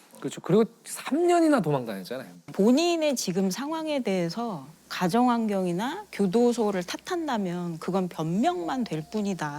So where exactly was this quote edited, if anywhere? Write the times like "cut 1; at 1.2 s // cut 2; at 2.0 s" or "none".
cut 1; at 2.4 s